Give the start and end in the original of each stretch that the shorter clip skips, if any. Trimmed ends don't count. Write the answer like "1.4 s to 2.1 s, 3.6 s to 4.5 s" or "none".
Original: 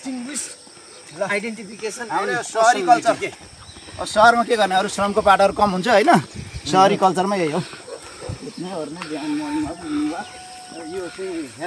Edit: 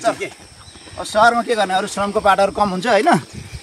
none